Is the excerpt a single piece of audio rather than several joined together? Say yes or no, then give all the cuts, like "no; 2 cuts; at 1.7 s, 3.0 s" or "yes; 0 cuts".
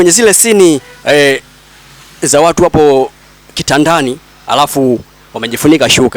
yes; 0 cuts